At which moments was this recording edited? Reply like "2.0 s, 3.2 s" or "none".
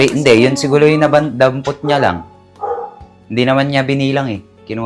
none